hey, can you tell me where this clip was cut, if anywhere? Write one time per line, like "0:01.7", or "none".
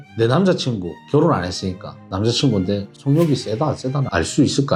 none